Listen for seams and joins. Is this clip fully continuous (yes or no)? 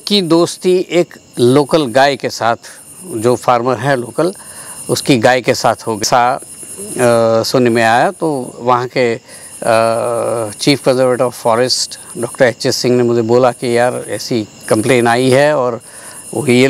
no